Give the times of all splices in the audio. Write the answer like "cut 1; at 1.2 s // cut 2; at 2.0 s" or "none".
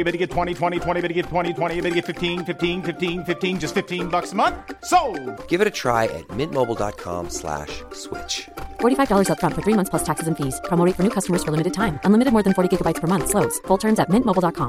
none